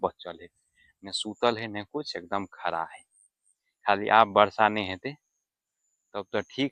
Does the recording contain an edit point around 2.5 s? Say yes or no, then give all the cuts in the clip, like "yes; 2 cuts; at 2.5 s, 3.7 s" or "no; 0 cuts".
no; 0 cuts